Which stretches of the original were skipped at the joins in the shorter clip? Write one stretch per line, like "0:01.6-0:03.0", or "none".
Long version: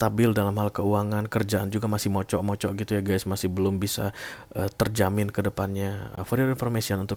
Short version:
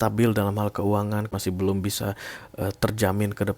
0:01.3-0:03.3